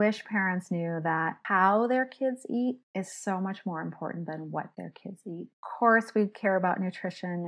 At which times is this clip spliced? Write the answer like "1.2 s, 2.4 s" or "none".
1.4 s, 2.8 s, 5.6 s